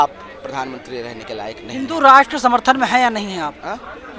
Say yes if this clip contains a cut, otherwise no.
no